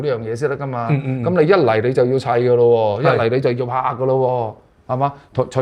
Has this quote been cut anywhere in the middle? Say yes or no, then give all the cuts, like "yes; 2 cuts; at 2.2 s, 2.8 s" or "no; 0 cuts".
no; 0 cuts